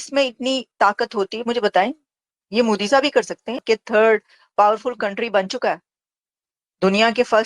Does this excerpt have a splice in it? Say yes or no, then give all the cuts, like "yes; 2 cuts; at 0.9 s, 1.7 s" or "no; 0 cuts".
yes; 1 cut; at 3.6 s